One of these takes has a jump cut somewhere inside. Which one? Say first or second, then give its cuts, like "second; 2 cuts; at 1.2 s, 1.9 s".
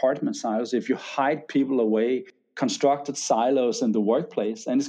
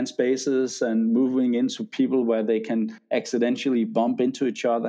first; 1 cut; at 2.3 s